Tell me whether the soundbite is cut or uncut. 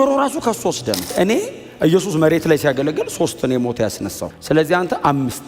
cut